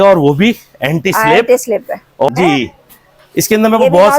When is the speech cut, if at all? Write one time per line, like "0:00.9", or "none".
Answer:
0:02.3